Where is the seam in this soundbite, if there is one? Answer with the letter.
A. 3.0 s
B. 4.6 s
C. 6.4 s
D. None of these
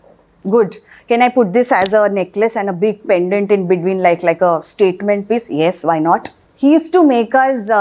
C